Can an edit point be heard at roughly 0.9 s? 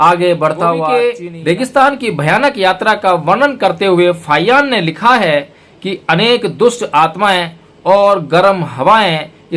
yes; 1 cut; at 0.9 s

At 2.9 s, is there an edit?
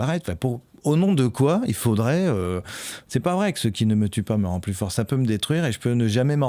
yes; 1 cut; at 2.9 s

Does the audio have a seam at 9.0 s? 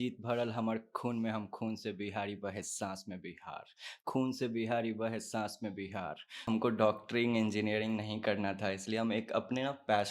no; 1 cut; at 6.4 s

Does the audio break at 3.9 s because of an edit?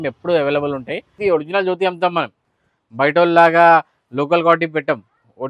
no; 1 cut; at 1.2 s

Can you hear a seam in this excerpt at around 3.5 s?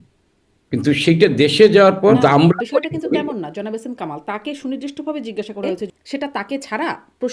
no; 2 cuts; at 2.1 s, 5.8 s

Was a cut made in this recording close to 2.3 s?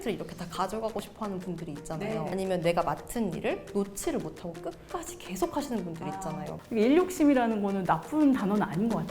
yes; 2 cuts; at 2.3 s, 6.5 s

